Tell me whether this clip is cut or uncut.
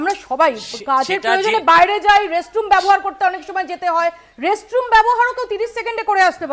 uncut